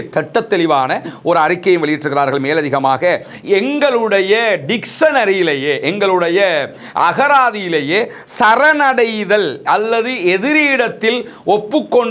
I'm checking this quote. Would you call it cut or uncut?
uncut